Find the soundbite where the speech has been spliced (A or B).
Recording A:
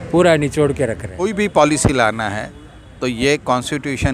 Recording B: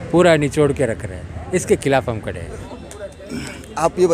A